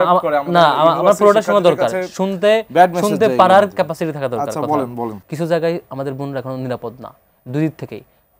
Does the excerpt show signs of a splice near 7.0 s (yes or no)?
no